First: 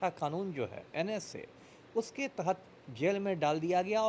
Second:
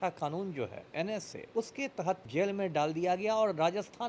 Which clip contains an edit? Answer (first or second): second